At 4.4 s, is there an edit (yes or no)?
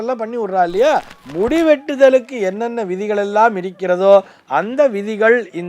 no